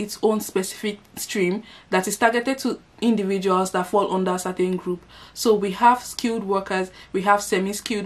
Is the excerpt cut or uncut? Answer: uncut